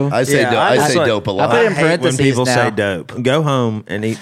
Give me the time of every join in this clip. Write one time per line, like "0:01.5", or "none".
0:03.1